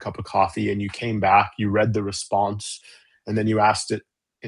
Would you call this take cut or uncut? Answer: uncut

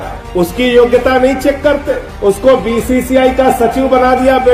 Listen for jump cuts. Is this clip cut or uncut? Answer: uncut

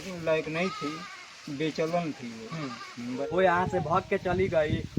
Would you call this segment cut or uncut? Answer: cut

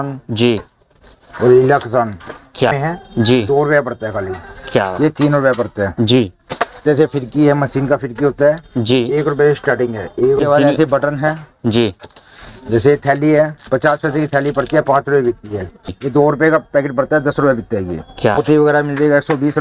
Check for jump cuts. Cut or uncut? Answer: cut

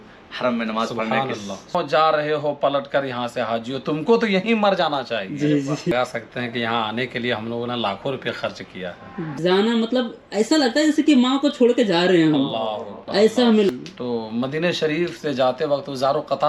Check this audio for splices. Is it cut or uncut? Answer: cut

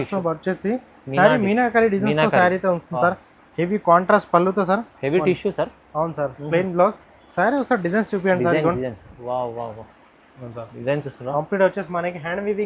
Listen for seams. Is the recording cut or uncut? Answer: uncut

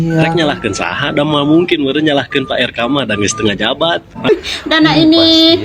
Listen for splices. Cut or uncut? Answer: cut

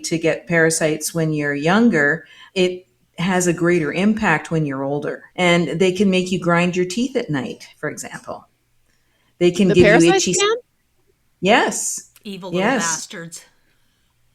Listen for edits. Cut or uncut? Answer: cut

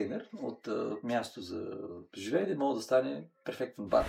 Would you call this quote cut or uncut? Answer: uncut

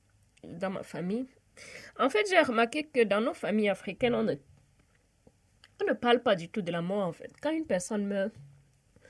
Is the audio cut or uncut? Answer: cut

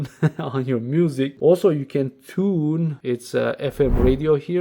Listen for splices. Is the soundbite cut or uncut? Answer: cut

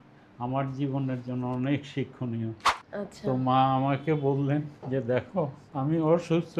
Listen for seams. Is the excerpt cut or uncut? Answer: cut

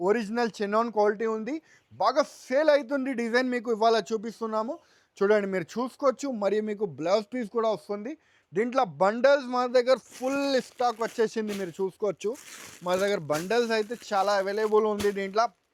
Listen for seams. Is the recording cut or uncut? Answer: uncut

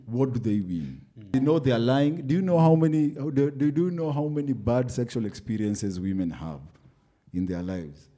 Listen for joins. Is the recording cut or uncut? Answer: cut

